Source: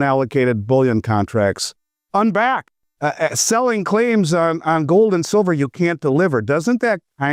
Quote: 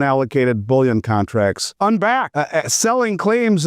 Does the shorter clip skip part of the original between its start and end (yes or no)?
yes